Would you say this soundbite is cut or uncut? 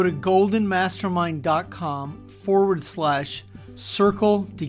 uncut